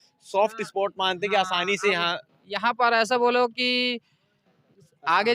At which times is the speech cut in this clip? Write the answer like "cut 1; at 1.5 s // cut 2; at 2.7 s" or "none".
none